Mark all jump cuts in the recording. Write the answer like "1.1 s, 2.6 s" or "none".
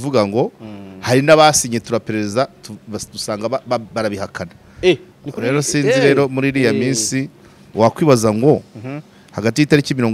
7.6 s